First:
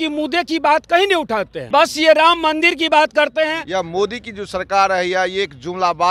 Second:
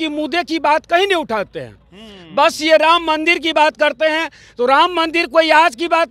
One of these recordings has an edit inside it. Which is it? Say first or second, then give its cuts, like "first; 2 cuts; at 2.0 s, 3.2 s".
first; 2 cuts; at 1.5 s, 3.6 s